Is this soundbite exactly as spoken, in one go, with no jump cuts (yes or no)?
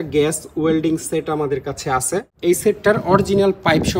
no